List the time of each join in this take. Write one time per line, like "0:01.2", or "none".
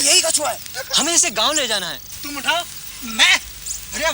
0:02.1